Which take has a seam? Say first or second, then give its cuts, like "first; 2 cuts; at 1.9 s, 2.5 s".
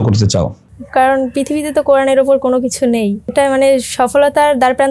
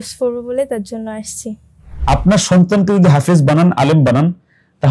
second; 1 cut; at 1.9 s